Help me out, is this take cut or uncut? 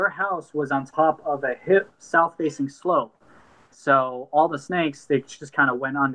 uncut